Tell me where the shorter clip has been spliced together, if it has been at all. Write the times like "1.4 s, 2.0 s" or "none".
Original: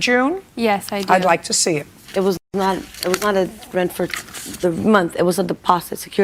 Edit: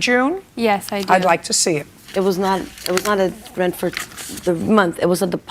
2.4 s